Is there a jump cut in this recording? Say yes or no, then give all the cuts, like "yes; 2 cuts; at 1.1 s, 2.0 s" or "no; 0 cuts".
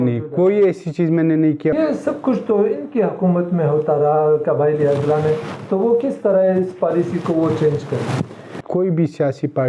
yes; 2 cuts; at 1.7 s, 8.6 s